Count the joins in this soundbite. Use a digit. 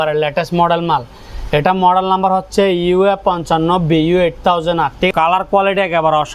1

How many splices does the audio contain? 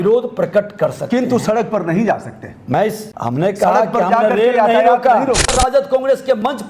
2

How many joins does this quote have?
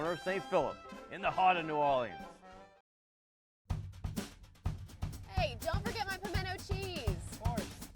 1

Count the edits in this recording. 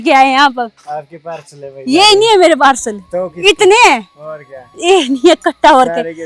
0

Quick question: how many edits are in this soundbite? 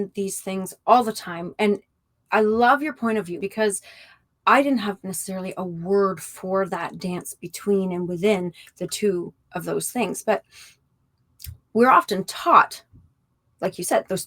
1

